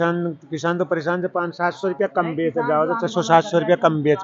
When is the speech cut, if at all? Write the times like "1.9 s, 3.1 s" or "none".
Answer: none